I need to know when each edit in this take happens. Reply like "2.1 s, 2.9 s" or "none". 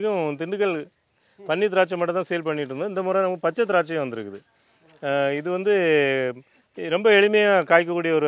none